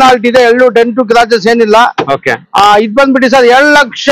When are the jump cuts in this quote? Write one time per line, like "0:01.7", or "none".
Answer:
none